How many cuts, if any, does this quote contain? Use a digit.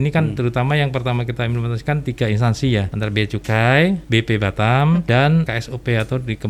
3